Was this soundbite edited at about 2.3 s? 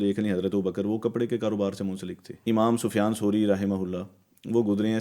yes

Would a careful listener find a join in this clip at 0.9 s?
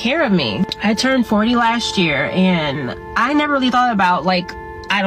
no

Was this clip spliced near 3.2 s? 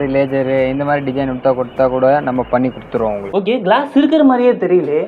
yes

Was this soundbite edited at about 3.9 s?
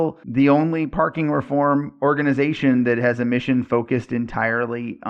no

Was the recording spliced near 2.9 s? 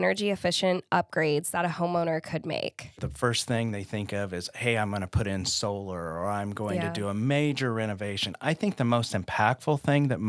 yes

